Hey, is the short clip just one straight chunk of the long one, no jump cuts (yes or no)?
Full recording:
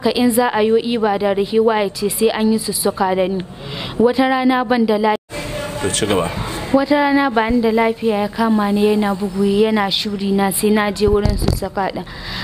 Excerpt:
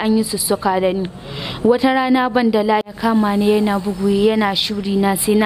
no